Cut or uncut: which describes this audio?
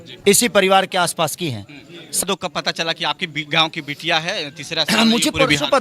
cut